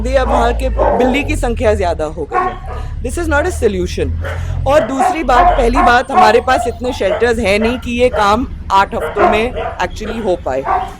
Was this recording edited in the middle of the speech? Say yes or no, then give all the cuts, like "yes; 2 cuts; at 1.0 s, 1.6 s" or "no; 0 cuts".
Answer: no; 0 cuts